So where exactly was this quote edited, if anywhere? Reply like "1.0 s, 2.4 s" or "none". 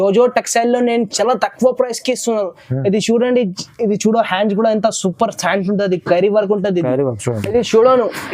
7.3 s